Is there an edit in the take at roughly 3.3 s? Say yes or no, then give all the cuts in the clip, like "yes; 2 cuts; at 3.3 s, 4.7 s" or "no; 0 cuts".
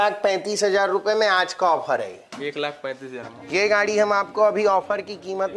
yes; 1 cut; at 3.3 s